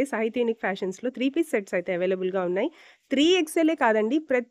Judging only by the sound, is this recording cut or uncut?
uncut